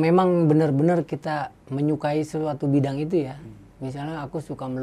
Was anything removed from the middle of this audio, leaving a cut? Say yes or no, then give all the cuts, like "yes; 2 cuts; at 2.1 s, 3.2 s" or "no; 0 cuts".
no; 0 cuts